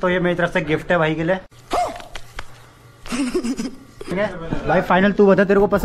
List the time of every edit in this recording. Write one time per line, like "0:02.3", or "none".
0:01.5
0:04.1